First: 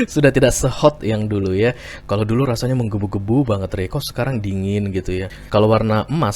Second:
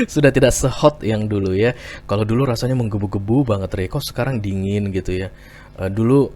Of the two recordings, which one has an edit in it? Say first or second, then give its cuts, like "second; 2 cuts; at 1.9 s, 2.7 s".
first; 1 cut; at 5.4 s